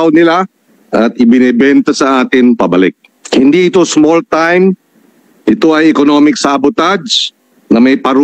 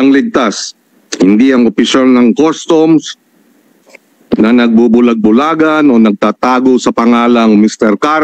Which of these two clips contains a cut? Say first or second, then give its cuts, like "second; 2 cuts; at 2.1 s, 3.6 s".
first; 1 cut; at 3.1 s